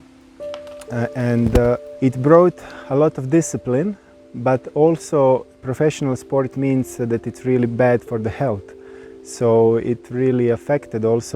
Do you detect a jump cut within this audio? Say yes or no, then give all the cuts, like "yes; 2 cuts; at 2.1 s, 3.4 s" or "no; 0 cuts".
yes; 1 cut; at 1.9 s